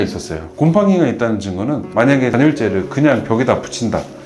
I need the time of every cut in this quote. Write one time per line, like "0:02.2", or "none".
0:01.8